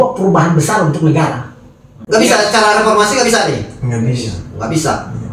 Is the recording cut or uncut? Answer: cut